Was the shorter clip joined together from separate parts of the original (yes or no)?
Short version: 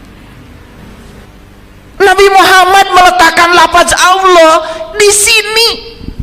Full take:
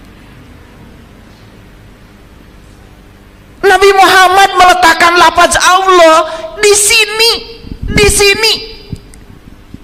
yes